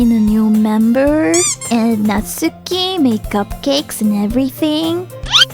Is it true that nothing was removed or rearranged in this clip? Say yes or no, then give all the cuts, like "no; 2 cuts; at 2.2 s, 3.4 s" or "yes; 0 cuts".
no; 1 cut; at 1.6 s